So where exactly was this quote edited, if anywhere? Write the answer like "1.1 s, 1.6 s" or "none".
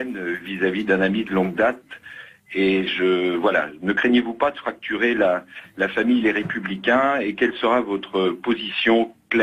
none